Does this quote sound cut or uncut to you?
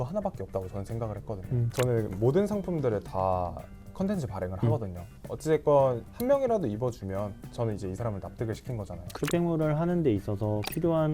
cut